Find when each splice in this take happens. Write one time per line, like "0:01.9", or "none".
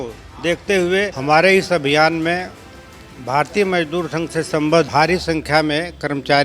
0:01.2
0:04.9

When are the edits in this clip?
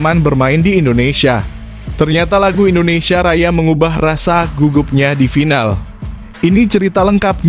none

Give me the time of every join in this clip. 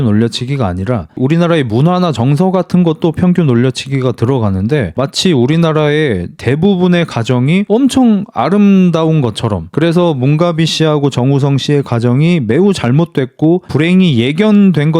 0:04.9

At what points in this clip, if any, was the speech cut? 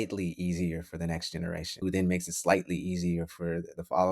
0:01.7

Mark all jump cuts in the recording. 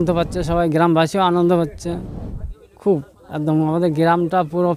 none

